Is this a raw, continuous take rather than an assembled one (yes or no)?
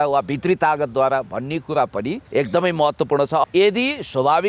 no